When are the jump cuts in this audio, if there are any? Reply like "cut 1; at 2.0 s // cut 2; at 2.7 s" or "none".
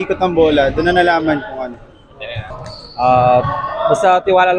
cut 1; at 2.5 s